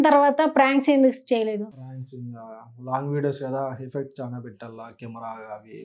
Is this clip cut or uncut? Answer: uncut